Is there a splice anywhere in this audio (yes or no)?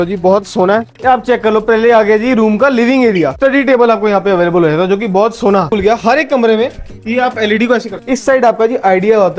yes